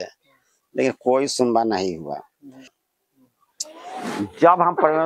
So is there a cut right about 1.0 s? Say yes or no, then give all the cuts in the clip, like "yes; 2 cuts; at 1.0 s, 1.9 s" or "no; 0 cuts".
no; 1 cut; at 2.7 s